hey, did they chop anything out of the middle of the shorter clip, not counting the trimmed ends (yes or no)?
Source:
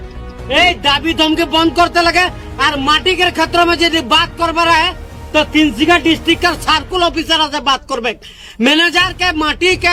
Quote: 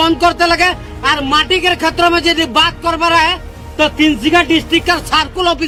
no